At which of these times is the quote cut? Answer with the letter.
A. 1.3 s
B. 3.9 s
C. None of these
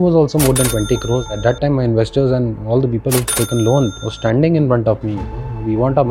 A